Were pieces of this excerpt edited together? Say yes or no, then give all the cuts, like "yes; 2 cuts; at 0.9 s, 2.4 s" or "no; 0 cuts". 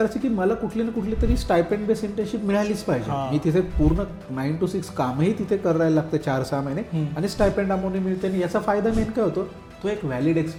no; 0 cuts